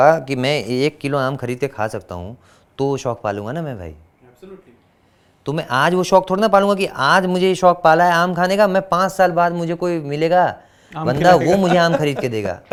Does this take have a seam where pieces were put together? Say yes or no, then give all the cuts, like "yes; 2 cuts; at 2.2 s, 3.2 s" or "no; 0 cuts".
no; 0 cuts